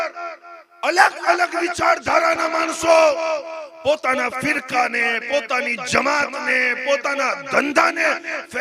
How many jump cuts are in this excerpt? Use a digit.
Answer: 0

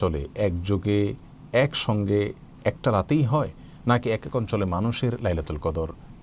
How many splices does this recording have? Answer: 0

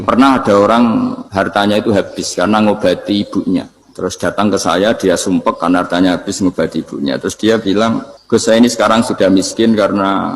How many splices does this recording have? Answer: 3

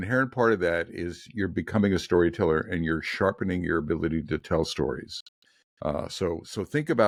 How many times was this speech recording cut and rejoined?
0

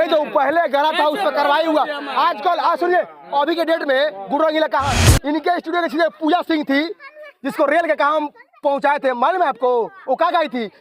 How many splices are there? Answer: 1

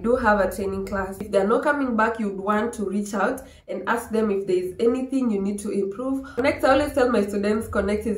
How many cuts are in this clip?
2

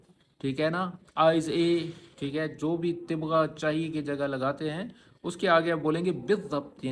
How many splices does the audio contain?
0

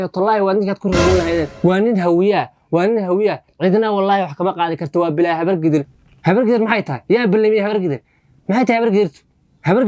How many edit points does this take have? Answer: 2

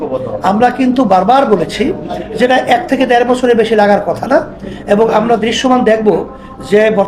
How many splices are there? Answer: 0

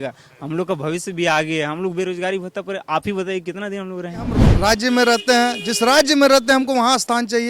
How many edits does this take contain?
1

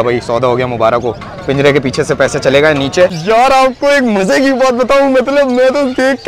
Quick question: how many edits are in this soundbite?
1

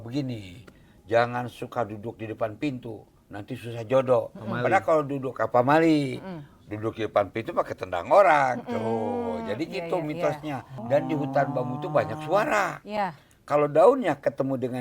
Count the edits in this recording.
1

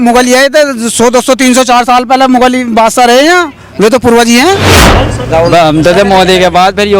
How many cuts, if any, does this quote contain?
1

